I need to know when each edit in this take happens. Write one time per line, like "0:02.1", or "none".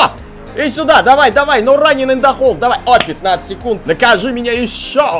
0:03.8